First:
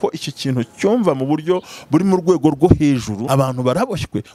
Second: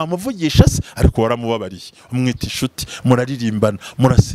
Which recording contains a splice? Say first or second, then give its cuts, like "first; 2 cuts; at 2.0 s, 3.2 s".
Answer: first; 1 cut; at 3.2 s